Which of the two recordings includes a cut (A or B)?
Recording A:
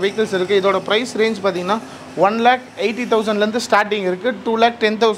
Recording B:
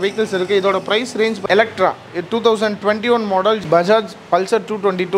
B